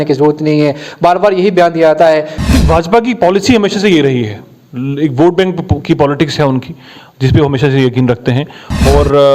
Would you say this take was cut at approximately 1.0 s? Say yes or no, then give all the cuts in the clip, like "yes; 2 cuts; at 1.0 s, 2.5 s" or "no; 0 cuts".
no; 1 cut; at 2.3 s